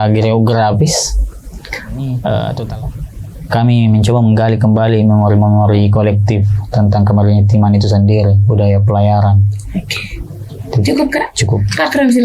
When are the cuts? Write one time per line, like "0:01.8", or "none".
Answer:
0:02.7